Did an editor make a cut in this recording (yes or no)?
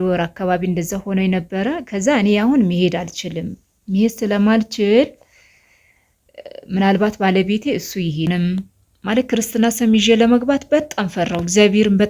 yes